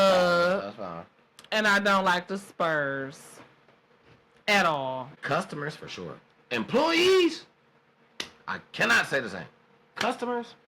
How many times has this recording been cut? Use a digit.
1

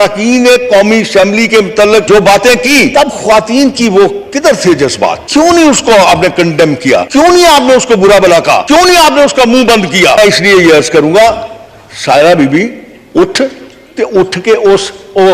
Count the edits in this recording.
6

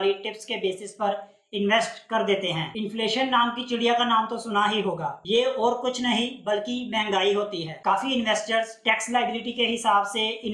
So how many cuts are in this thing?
2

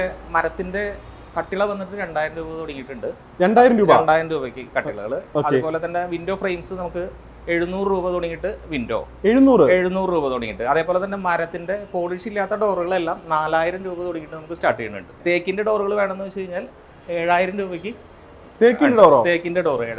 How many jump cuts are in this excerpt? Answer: 1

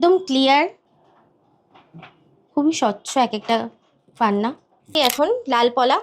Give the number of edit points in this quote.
2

